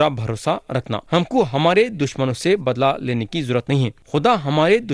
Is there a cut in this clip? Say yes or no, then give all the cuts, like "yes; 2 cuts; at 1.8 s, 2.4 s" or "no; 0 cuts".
yes; 2 cuts; at 1.0 s, 4.0 s